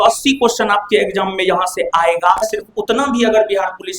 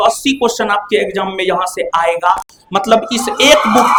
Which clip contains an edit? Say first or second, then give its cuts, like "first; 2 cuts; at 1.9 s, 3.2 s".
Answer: first; 1 cut; at 2.5 s